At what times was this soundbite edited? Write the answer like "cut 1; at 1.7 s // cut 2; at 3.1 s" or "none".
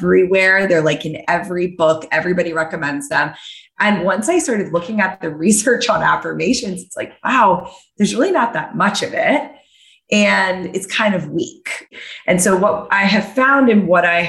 cut 1; at 4.5 s // cut 2; at 11.8 s